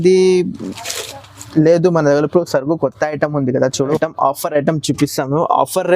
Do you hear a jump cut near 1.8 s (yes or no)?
no